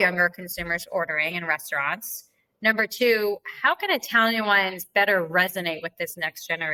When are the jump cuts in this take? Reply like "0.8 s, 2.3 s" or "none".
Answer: none